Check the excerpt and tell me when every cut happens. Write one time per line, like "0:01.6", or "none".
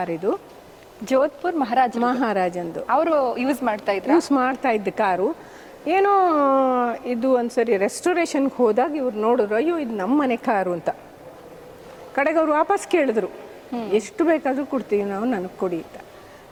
none